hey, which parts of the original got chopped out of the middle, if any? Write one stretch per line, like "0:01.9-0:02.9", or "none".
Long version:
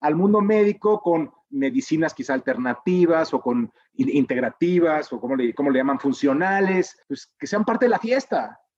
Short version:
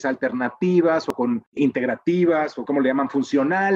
0:03.4-0:03.7
0:05.2-0:05.5